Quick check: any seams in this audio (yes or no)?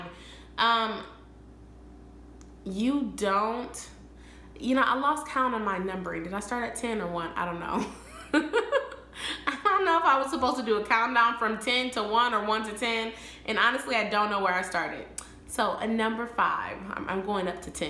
no